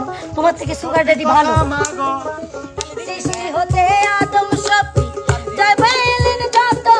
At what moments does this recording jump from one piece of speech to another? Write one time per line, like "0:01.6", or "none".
0:02.8